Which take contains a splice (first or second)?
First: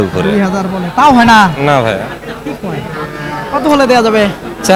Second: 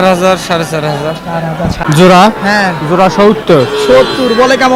second